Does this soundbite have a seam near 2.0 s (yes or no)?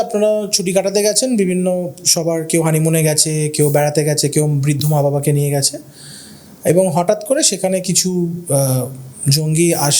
no